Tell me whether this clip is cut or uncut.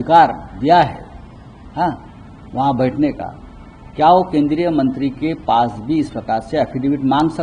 uncut